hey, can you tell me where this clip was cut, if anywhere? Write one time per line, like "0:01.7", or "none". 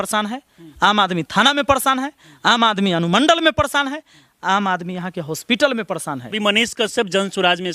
0:06.3